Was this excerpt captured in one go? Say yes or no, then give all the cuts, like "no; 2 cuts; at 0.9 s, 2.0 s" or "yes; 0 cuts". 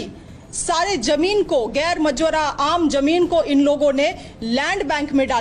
yes; 0 cuts